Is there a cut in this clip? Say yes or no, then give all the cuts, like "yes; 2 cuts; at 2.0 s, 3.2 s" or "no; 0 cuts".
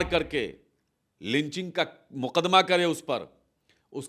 no; 0 cuts